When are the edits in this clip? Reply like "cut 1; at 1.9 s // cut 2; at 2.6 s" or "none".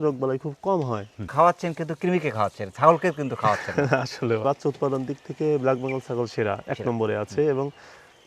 cut 1; at 1.1 s // cut 2; at 4.4 s